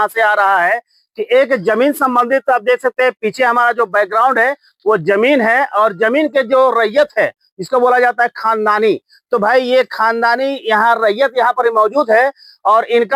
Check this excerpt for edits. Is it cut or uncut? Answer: uncut